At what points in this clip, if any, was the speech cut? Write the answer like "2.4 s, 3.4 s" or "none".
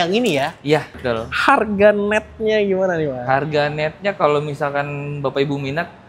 0.9 s